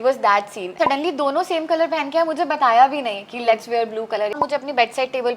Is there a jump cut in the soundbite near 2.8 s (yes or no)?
no